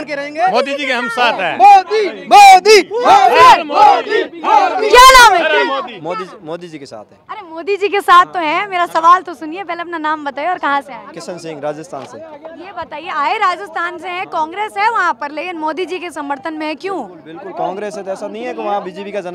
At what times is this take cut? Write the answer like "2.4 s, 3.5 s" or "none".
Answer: none